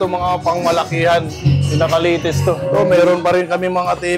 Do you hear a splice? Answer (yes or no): yes